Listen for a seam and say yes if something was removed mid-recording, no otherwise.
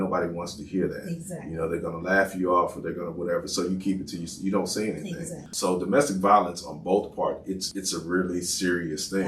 yes